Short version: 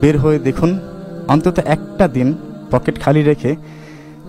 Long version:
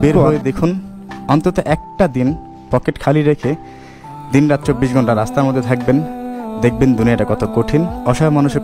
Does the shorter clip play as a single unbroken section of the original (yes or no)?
yes